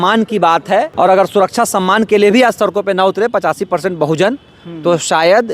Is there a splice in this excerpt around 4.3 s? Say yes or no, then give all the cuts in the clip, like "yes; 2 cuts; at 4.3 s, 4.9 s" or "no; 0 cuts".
no; 1 cut; at 0.9 s